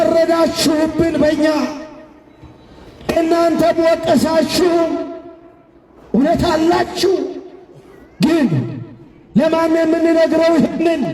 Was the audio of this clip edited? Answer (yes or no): no